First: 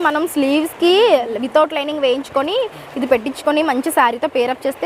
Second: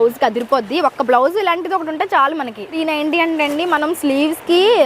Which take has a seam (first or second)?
second